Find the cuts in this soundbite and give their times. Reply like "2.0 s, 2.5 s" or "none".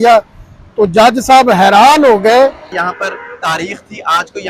2.8 s